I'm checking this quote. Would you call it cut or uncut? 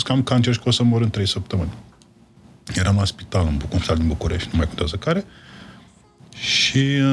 uncut